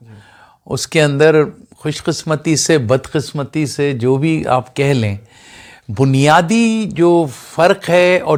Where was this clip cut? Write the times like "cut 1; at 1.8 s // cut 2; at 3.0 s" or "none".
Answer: none